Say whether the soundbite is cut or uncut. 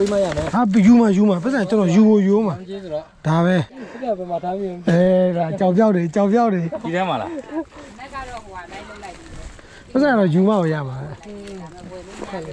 uncut